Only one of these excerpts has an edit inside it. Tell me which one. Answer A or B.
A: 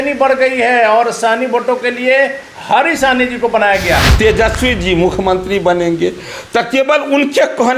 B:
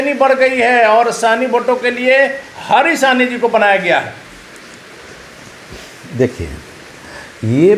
A